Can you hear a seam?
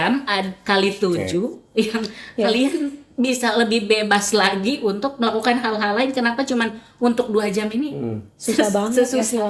no; 0 cuts

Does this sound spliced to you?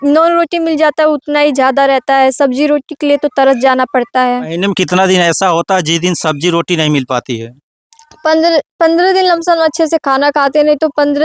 yes; 1 cut; at 4.5 s

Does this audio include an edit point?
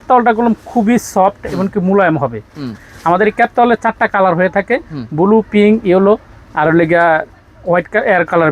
no; 0 cuts

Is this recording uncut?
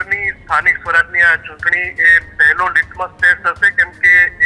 yes; 0 cuts

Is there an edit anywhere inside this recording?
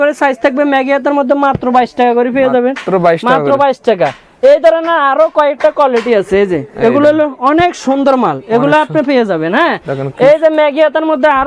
no; 0 cuts

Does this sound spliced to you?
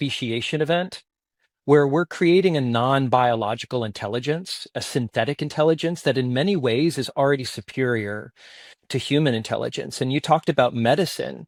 no; 0 cuts

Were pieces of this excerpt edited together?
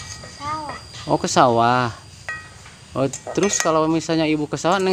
no; 0 cuts

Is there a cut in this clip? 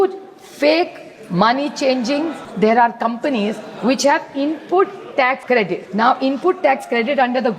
yes; 2 cuts; at 2.4 s, 5.6 s

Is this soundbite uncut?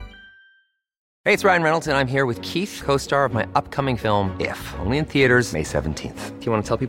no; 1 cut; at 1.0 s

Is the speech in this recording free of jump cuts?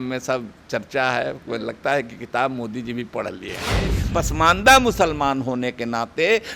no; 1 cut; at 4.0 s

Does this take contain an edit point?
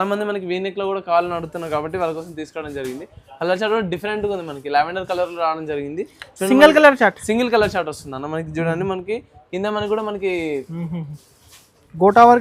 no; 0 cuts

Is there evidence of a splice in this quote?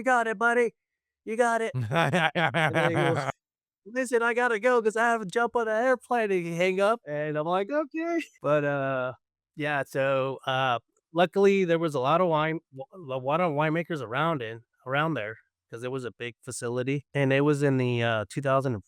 yes; 3 cuts; at 7.1 s, 8.3 s, 17.1 s

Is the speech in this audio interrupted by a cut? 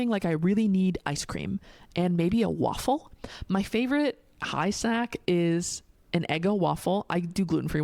no; 0 cuts

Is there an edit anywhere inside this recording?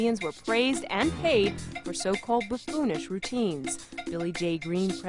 yes; 1 cut; at 2.2 s

